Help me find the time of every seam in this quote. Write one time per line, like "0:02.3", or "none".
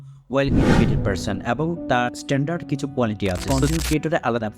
0:03.5